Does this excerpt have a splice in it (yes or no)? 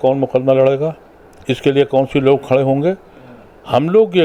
no